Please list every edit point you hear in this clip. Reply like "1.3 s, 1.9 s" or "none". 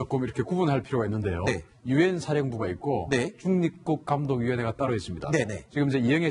3.2 s